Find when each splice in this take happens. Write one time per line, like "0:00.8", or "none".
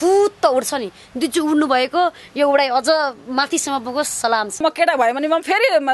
0:04.6